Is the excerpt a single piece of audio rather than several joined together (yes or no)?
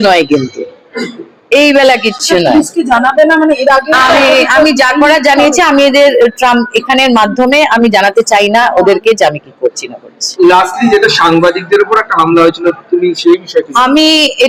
yes